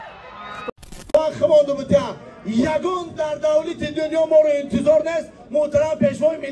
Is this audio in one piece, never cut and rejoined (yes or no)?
no